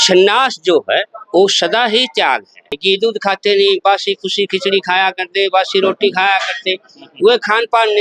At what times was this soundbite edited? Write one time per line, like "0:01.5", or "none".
0:02.8